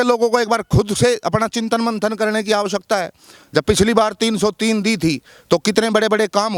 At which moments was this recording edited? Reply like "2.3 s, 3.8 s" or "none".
none